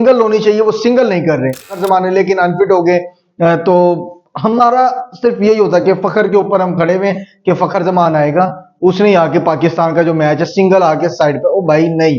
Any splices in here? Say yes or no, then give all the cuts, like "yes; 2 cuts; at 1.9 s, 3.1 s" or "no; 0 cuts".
yes; 1 cut; at 1.8 s